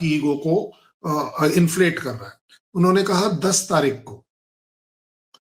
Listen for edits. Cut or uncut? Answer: uncut